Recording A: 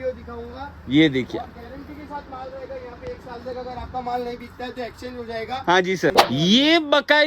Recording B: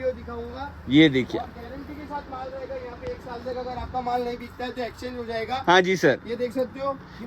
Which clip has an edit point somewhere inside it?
A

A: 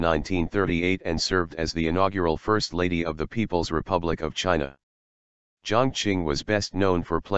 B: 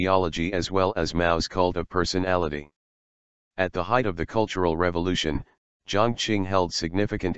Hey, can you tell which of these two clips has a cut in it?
A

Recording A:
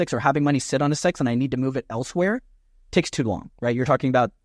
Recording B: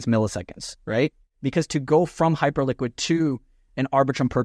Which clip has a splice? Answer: B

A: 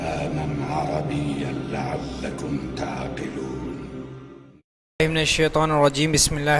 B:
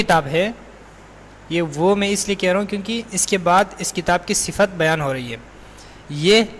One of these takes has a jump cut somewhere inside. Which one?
B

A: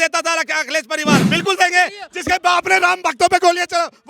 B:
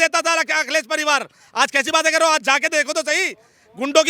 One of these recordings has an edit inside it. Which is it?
A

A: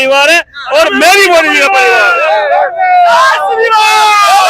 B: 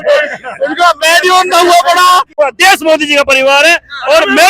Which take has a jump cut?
B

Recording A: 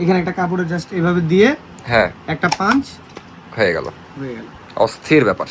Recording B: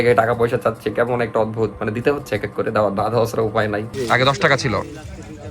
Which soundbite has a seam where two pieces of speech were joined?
B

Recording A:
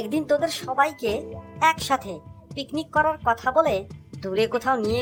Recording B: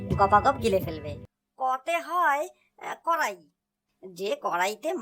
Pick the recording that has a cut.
B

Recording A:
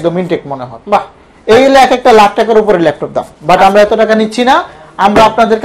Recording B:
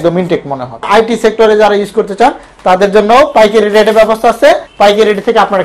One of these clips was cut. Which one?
B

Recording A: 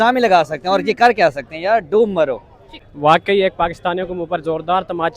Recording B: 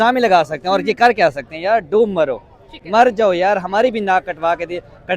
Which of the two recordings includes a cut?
A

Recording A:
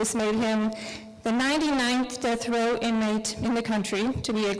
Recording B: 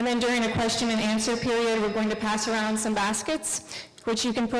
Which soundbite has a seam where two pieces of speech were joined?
A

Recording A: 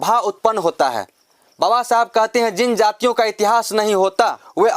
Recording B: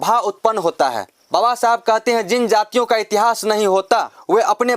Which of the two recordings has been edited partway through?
B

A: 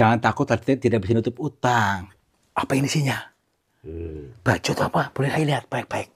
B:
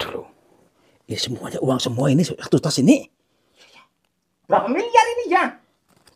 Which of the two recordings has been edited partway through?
A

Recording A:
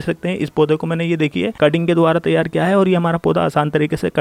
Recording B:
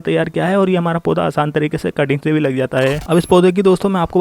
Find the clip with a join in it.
B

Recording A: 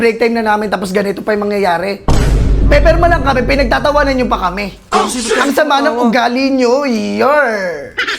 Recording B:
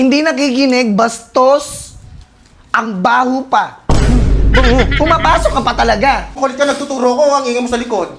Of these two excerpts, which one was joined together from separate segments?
B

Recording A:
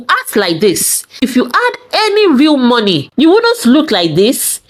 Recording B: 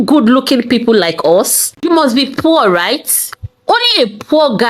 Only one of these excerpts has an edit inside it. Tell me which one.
B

